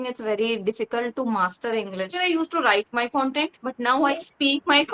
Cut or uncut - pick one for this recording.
cut